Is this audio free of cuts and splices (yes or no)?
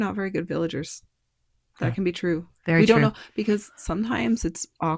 yes